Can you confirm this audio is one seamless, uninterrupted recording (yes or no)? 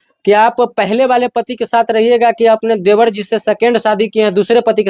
yes